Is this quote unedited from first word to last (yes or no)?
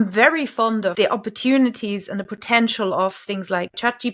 no